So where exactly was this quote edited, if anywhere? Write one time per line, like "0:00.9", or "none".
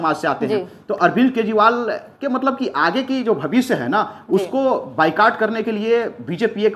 none